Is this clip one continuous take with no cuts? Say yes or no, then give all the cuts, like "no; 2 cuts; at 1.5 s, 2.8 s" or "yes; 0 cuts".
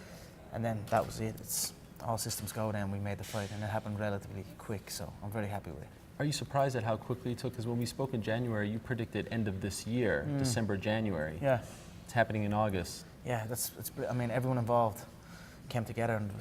no; 1 cut; at 4.3 s